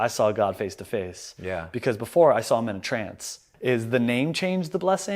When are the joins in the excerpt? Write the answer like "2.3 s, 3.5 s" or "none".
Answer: 3.5 s